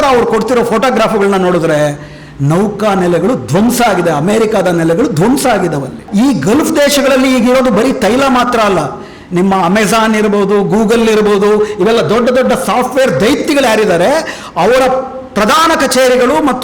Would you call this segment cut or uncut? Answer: cut